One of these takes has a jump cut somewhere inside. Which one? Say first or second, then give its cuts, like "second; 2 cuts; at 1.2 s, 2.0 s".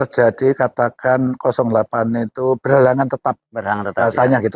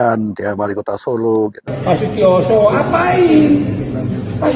second; 1 cut; at 1.7 s